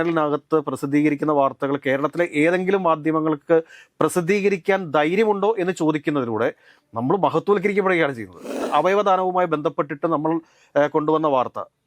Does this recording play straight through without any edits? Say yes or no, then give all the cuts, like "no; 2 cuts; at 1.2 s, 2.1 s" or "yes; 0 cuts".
no; 1 cut; at 8.6 s